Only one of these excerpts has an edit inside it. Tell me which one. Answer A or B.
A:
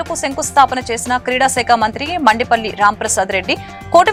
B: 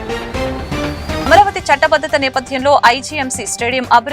B